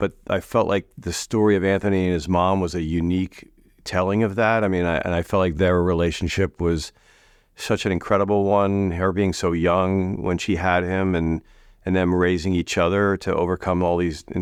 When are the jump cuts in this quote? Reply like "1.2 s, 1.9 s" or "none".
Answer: none

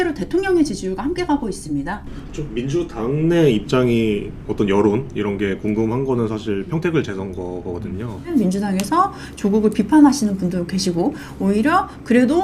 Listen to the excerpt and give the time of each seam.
2.2 s, 8.3 s

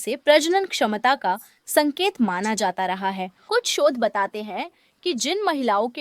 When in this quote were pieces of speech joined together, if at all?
3.3 s

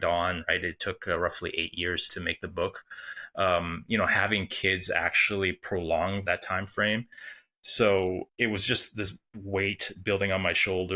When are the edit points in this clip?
2.1 s, 6.2 s, 8.3 s

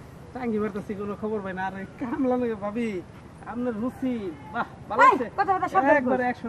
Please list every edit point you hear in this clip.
none

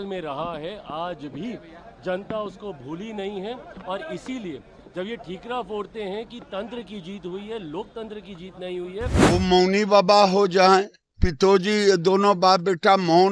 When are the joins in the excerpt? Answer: 9.3 s

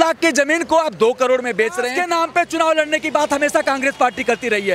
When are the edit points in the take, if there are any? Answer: 2.0 s

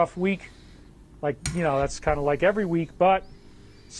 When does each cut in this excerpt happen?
none

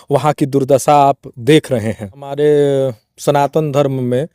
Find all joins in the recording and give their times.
2.3 s

